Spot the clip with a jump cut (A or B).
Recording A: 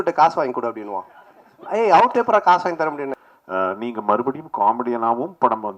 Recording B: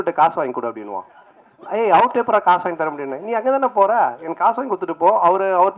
A